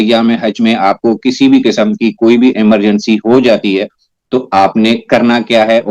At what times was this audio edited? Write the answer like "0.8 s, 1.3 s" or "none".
none